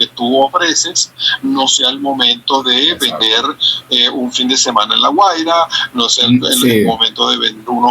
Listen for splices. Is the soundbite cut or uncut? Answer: uncut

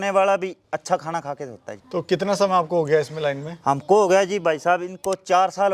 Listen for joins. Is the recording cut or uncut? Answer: uncut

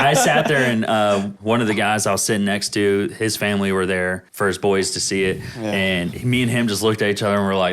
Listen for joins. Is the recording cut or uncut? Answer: cut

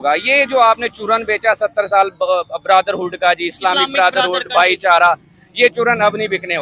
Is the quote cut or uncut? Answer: uncut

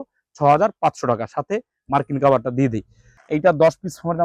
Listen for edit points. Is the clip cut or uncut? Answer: cut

